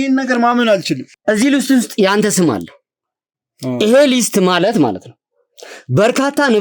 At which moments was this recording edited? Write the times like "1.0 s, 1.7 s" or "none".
1.1 s